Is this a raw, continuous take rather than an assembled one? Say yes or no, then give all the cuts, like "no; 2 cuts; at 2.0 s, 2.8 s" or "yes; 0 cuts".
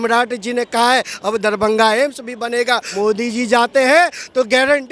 no; 1 cut; at 2.9 s